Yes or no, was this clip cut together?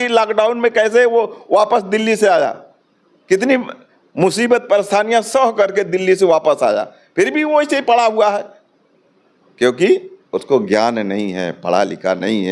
no